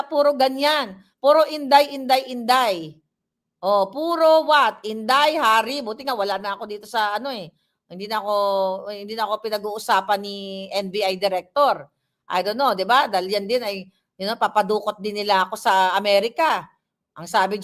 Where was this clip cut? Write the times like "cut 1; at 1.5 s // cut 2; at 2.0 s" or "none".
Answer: none